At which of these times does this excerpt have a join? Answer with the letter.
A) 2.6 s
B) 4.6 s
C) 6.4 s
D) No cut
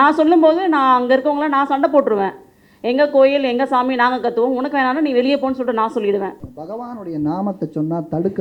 C